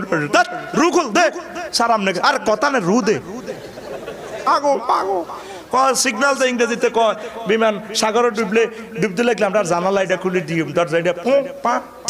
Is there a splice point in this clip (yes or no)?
yes